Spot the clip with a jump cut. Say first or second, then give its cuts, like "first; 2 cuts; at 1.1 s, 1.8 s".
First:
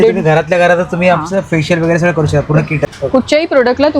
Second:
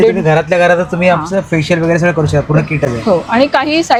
first; 1 cut; at 2.9 s